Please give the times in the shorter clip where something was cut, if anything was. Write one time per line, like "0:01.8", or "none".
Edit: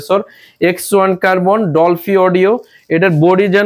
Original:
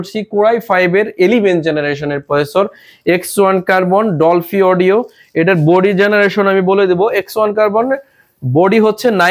none

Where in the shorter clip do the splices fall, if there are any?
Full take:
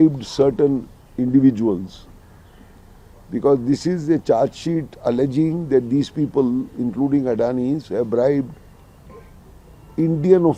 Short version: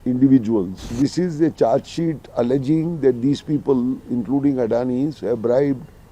0:00.9

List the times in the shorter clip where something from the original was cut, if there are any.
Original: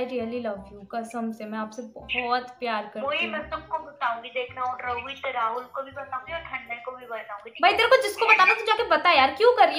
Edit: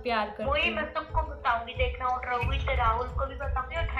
none

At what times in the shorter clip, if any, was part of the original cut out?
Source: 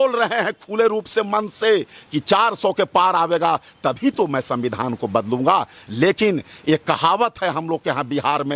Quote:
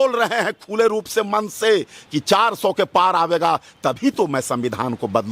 none

